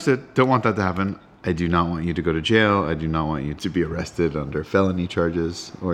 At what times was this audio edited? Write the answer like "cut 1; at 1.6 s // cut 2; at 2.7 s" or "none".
cut 1; at 1.3 s